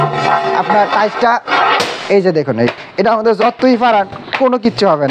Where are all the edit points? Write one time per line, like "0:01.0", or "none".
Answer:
none